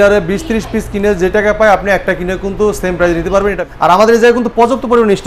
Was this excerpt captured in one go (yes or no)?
no